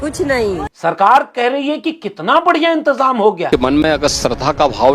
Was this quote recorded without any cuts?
no; 1 cut; at 3.5 s

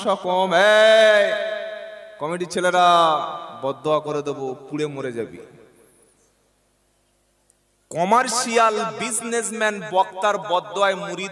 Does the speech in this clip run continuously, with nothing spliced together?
yes; 0 cuts

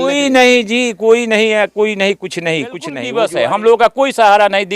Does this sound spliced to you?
yes; 1 cut; at 2.9 s

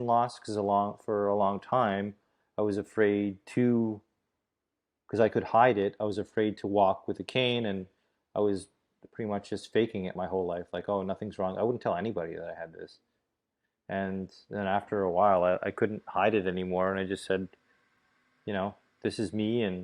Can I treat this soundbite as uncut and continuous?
yes; 0 cuts

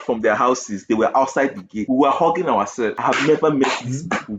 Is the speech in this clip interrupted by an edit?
yes; 2 cuts; at 1.7 s, 3.0 s

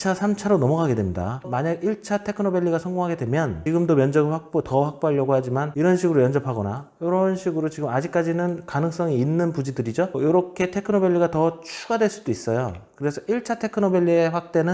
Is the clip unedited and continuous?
yes; 0 cuts

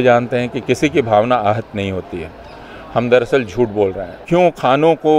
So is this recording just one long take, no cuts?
no; 1 cut; at 4.2 s

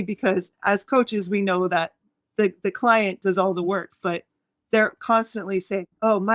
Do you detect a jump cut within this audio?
no; 0 cuts

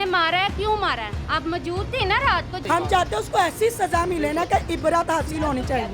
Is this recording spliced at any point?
yes; 1 cut; at 2.5 s

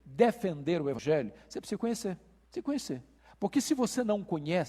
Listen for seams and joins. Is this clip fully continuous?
no; 1 cut; at 1.0 s

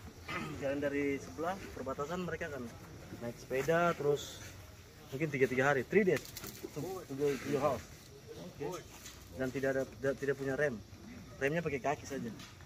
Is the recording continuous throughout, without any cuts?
yes; 0 cuts

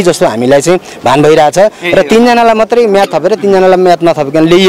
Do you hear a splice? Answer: no; 0 cuts

